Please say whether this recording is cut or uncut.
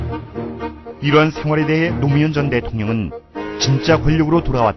cut